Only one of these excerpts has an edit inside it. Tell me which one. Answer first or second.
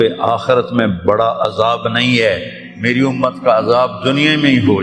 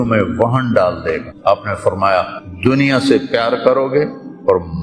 second